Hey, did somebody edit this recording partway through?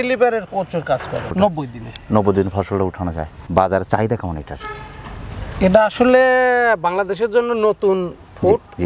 yes; 2 cuts; at 1.0 s, 3.4 s

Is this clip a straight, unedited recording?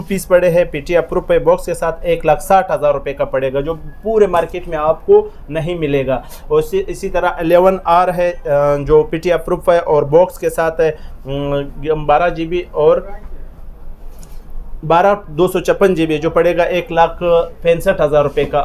yes; 0 cuts

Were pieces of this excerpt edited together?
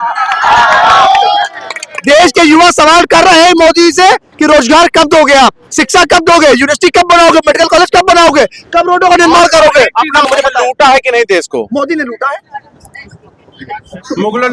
yes; 1 cut; at 10.2 s

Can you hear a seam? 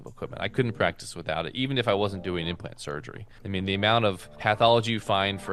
no; 0 cuts

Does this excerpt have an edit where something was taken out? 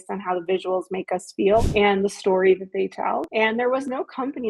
yes; 2 cuts; at 1.7 s, 3.3 s

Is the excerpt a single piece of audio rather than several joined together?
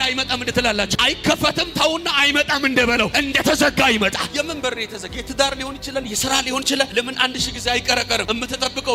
yes; 0 cuts

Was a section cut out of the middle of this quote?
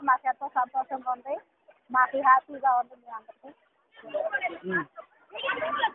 no; 0 cuts

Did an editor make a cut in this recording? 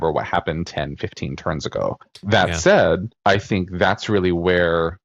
yes; 2 cuts; at 2.1 s, 3.1 s

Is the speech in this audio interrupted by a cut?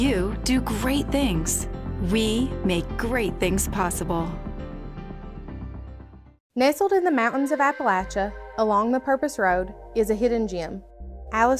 yes; 1 cut; at 6.3 s

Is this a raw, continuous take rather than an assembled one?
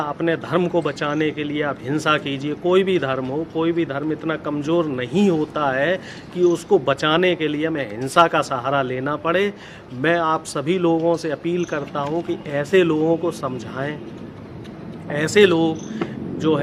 yes; 0 cuts

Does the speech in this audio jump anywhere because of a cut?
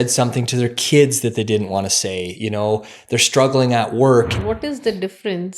yes; 1 cut; at 4.4 s

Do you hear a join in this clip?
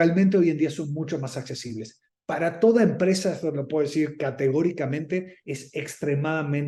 no; 0 cuts

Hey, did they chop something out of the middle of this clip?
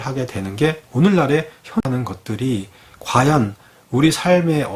yes; 1 cut; at 1.8 s

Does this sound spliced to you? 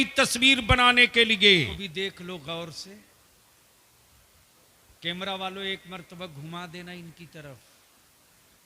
yes; 1 cut; at 1.8 s

